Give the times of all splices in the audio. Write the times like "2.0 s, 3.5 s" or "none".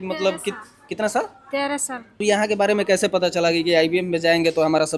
2.2 s